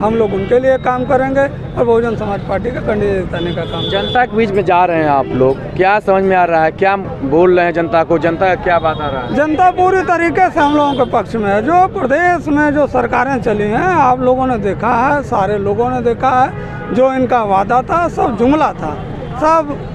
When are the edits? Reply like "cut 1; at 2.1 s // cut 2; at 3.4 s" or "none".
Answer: none